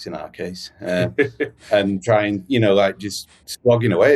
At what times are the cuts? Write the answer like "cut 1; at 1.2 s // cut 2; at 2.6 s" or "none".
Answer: none